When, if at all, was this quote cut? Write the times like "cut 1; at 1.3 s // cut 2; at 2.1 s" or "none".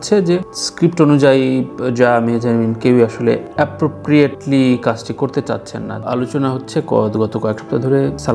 cut 1; at 6.0 s